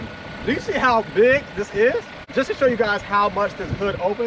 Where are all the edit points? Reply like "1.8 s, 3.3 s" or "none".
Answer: 2.2 s